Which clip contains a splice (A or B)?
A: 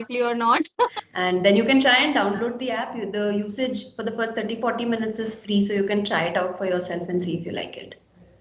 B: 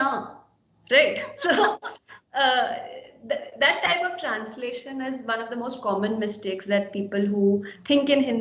A